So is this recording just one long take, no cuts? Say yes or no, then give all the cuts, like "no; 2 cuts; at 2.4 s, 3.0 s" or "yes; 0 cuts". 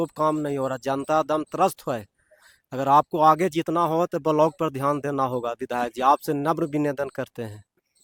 yes; 0 cuts